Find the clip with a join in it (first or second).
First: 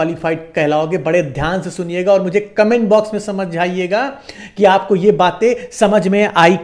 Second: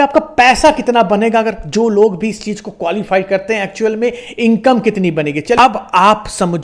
second